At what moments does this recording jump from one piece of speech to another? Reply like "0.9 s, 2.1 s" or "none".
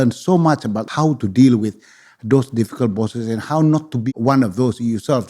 0.8 s, 3.9 s